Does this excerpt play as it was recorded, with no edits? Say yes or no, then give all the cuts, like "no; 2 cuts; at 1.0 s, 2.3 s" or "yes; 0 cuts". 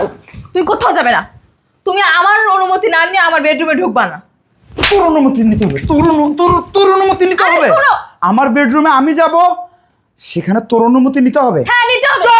yes; 0 cuts